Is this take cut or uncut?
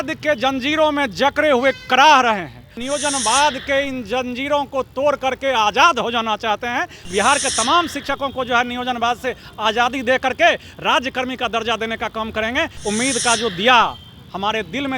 cut